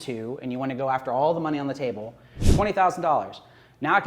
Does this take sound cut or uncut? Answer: cut